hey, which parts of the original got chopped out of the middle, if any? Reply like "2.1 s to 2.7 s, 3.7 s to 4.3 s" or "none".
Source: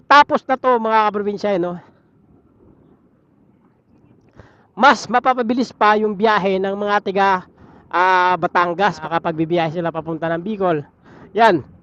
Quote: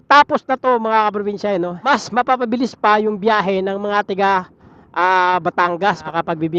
1.8 s to 4.8 s